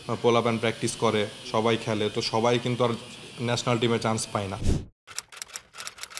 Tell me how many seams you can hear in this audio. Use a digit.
1